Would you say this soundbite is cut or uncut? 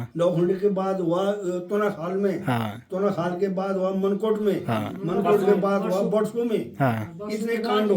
uncut